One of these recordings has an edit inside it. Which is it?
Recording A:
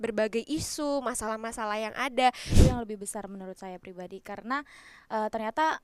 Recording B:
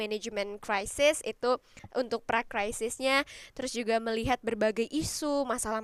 A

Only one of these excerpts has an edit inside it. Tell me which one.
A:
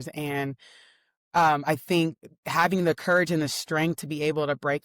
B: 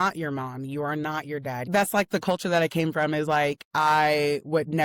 B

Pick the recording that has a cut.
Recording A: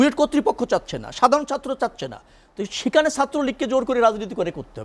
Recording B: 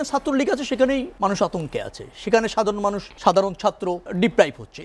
B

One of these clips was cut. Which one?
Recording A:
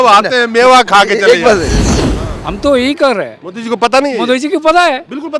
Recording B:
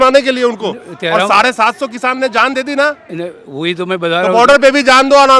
A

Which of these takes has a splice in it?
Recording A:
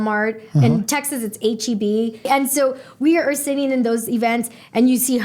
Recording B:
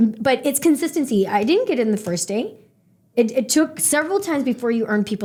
A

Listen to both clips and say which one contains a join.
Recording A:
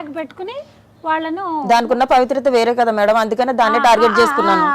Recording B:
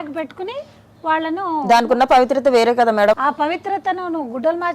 B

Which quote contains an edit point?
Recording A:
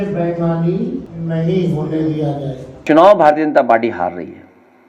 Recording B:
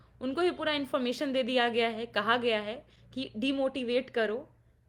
A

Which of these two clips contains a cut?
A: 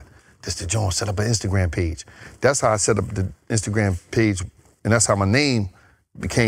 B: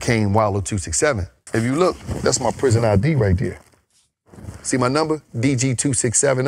B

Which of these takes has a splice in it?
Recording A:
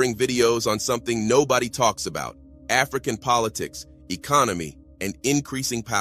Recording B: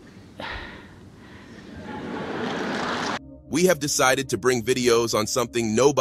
B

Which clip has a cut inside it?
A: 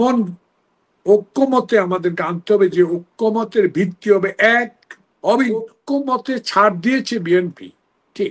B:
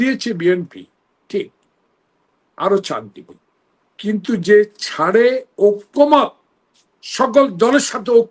A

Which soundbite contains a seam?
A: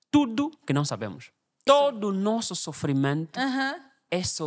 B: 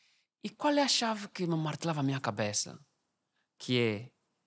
A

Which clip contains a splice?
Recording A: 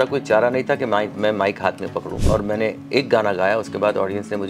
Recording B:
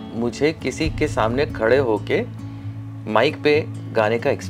A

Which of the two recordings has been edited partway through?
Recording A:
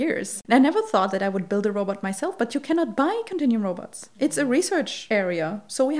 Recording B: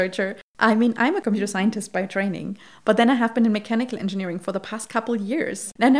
A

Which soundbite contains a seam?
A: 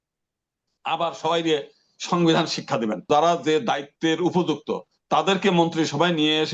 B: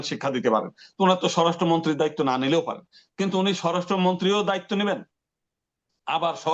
A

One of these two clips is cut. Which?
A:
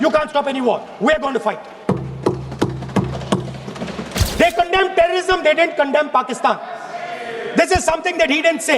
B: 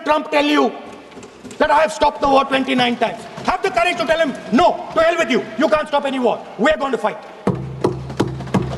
A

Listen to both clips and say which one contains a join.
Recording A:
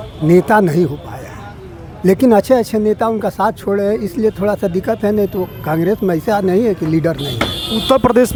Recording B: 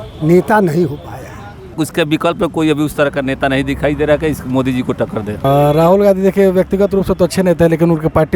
B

